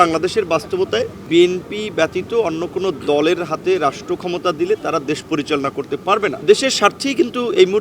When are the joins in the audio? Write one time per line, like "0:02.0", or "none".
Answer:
0:01.2
0:06.4